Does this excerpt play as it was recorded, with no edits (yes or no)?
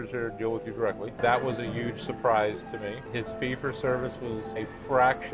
no